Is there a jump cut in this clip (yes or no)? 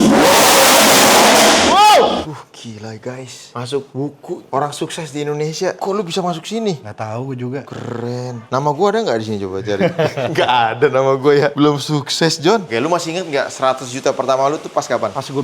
yes